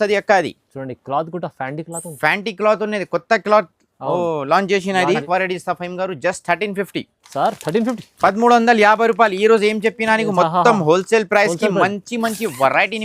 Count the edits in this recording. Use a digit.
1